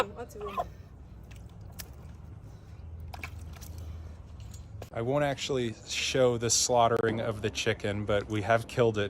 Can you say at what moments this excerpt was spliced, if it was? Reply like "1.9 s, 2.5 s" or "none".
4.9 s